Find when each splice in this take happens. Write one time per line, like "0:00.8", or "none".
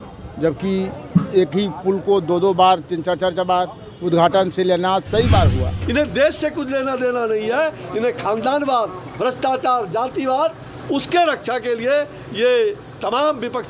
0:05.7